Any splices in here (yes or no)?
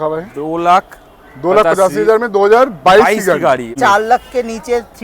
yes